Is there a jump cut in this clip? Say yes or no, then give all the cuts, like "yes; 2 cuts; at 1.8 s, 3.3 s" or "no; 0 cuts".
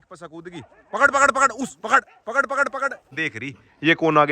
yes; 1 cut; at 3.1 s